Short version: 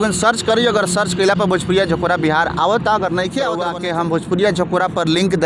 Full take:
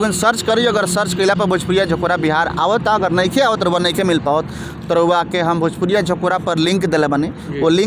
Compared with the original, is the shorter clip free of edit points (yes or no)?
no